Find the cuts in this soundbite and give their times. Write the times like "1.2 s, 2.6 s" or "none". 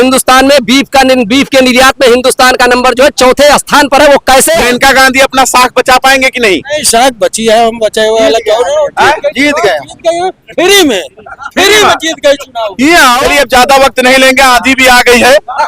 4.5 s, 13.2 s